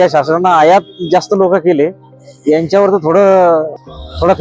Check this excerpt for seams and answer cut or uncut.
uncut